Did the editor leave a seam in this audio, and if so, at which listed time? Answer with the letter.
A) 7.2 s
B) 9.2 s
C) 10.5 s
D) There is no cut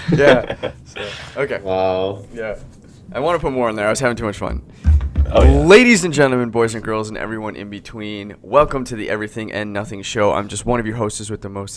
A